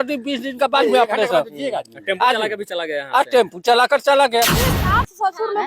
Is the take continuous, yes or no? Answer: no